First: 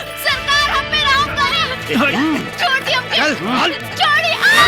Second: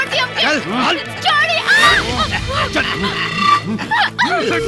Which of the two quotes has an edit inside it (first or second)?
first